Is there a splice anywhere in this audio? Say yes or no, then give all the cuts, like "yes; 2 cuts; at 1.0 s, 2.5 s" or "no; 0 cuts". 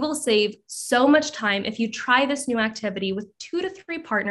no; 0 cuts